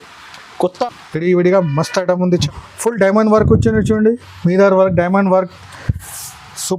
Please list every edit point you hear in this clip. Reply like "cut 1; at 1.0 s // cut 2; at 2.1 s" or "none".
cut 1; at 2.5 s